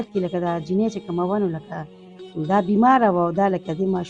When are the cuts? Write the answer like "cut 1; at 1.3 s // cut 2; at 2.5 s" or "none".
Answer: none